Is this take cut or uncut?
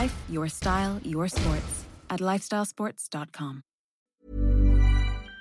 cut